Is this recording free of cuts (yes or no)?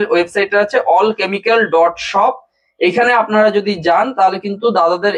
yes